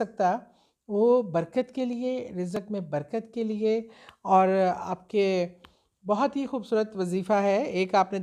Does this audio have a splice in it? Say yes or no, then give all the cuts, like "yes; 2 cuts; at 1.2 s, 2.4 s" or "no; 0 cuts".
no; 0 cuts